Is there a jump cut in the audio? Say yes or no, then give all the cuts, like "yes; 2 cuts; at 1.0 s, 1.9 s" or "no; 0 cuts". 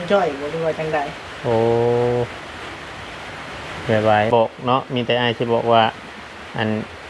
yes; 1 cut; at 4.3 s